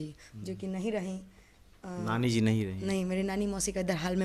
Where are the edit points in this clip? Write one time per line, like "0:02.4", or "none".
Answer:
none